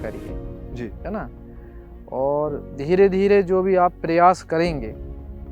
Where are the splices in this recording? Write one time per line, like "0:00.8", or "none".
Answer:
none

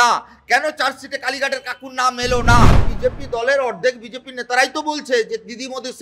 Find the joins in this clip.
0:02.9

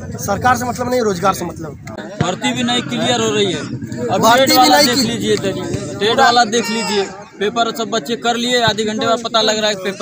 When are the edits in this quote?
0:02.1

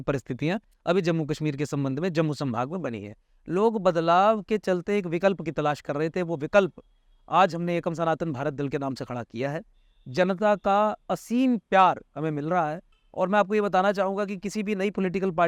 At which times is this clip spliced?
none

